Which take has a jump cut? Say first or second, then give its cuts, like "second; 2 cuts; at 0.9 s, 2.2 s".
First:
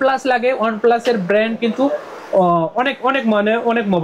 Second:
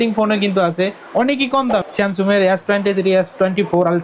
second; 1 cut; at 1.9 s